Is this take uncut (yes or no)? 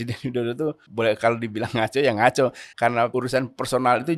no